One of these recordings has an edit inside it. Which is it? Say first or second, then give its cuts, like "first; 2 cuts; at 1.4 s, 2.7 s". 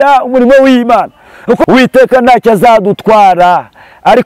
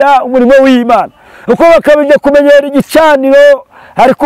first; 1 cut; at 1.6 s